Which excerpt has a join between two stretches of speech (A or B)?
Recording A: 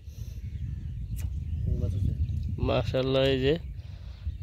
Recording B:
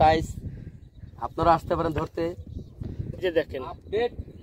B